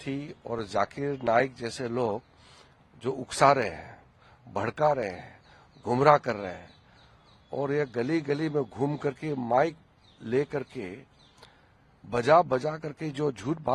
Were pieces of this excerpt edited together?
no; 0 cuts

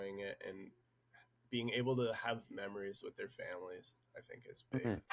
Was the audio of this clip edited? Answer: no; 0 cuts

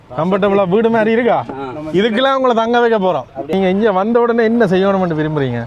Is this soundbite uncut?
no; 1 cut; at 3.3 s

